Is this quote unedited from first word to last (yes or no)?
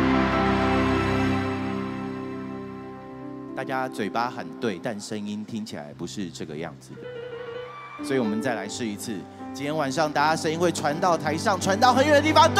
yes